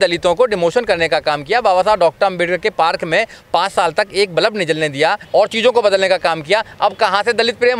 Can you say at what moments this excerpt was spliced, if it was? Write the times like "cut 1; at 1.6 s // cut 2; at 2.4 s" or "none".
cut 1; at 5.2 s